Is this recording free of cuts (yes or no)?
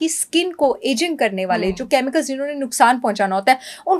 yes